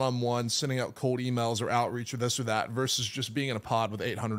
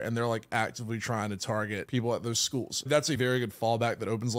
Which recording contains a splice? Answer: second; 2 cuts; at 1.8 s, 2.9 s

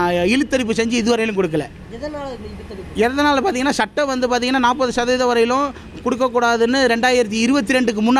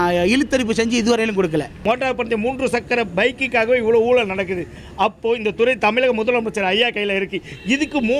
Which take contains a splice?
second; 1 cut; at 1.8 s

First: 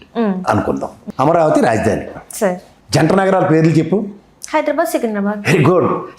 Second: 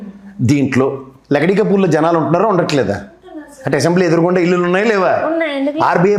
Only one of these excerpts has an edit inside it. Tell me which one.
first; 2 cuts; at 0.9 s, 2.7 s

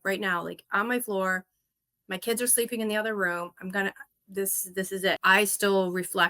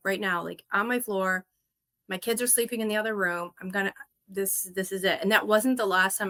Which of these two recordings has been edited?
first; 1 cut; at 5.2 s

